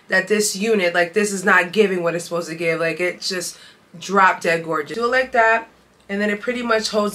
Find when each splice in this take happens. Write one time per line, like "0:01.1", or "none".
0:04.9